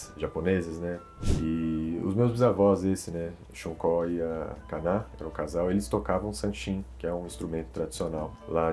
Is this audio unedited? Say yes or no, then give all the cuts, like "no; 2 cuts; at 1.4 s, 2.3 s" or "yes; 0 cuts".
no; 1 cut; at 1.1 s